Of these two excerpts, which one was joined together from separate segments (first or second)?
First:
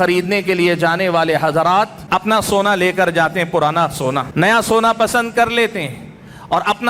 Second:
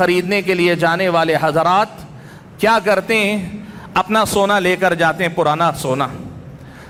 first